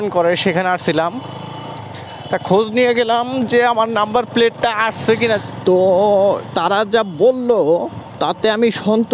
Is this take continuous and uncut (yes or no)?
yes